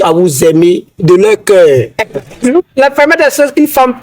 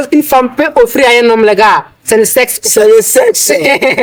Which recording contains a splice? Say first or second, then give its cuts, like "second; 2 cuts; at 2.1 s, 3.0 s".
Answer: first; 2 cuts; at 0.9 s, 2.3 s